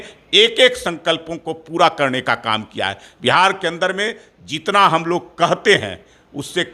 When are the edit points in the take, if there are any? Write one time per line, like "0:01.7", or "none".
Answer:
none